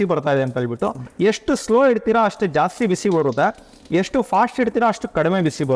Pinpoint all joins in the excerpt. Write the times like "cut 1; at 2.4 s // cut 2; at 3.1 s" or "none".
none